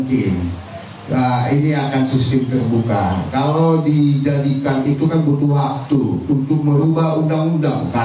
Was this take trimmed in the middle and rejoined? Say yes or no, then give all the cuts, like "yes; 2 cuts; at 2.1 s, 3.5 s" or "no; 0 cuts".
no; 0 cuts